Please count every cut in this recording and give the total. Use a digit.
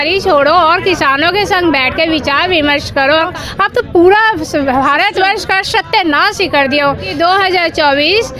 2